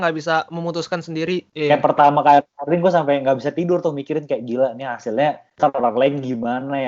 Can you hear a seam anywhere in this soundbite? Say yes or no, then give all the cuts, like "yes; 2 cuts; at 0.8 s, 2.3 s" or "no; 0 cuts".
yes; 1 cut; at 1.5 s